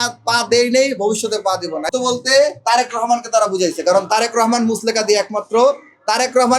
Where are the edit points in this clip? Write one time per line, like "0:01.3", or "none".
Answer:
0:01.9